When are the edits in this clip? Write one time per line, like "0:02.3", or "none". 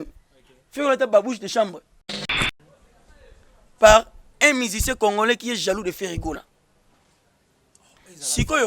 0:02.3